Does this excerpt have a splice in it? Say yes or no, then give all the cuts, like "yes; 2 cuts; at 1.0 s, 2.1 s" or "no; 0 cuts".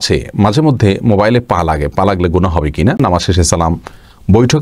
yes; 1 cut; at 3.0 s